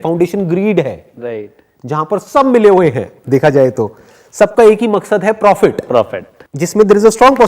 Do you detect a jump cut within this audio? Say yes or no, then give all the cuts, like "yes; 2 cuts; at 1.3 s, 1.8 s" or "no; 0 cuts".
yes; 1 cut; at 5.9 s